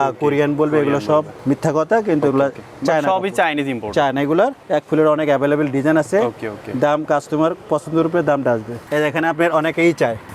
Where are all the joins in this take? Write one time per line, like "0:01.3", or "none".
none